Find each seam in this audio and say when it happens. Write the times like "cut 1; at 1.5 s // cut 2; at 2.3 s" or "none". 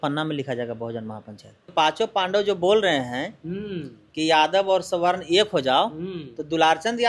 cut 1; at 1.7 s